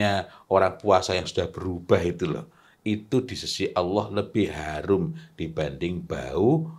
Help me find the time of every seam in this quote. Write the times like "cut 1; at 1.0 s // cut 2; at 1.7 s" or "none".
none